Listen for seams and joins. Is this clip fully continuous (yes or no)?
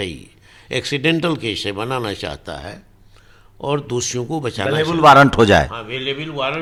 yes